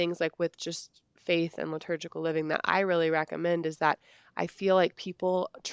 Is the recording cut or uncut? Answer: uncut